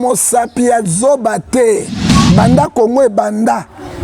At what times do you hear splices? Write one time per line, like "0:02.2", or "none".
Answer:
0:02.0